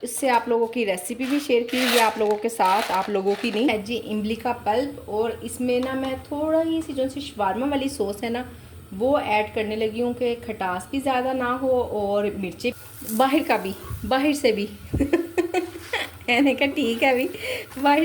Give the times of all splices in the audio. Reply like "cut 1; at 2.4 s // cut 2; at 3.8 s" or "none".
cut 1; at 3.7 s // cut 2; at 12.7 s